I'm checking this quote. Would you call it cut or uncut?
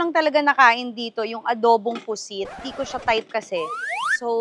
cut